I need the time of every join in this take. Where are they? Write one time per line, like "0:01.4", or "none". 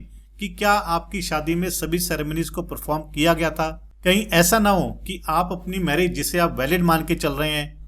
0:03.9